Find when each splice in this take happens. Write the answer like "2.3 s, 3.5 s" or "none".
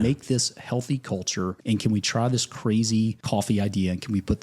1.6 s, 3.2 s